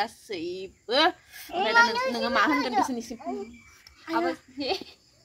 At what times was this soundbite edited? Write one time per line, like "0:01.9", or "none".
none